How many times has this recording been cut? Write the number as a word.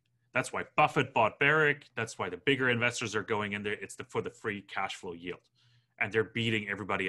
zero